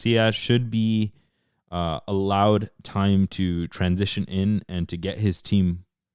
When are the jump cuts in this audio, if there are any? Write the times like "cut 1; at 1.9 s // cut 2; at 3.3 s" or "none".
none